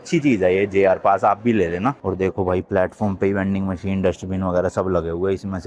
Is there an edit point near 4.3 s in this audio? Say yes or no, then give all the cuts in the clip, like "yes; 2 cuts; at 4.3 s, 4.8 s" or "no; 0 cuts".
no; 1 cut; at 2.0 s